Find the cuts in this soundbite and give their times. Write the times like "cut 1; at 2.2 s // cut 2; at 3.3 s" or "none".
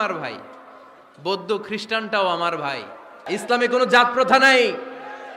cut 1; at 3.3 s